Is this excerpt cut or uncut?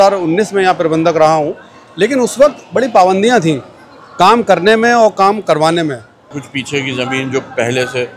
cut